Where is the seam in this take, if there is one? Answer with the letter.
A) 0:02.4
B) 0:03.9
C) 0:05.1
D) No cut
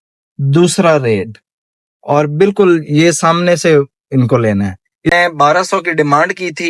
C